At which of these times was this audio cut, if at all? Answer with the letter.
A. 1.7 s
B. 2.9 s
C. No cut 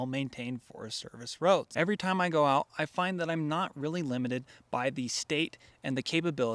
A